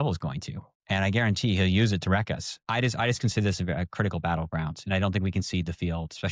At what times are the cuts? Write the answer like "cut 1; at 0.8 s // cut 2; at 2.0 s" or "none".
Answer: cut 1; at 2.7 s